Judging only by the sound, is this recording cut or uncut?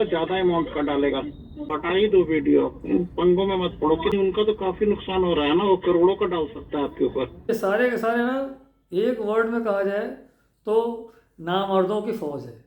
cut